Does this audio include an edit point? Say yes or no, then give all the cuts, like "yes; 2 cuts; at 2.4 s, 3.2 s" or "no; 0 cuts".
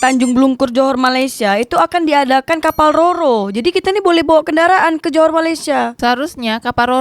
yes; 1 cut; at 5.9 s